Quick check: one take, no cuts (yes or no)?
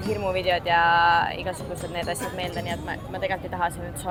yes